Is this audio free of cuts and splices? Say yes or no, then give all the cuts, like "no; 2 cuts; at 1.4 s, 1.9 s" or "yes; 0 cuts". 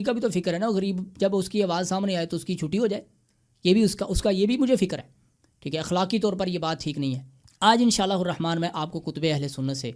yes; 0 cuts